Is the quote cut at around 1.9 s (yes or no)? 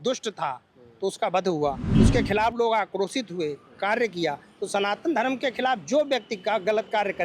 yes